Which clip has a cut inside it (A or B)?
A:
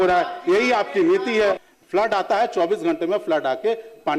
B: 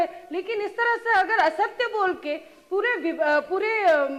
A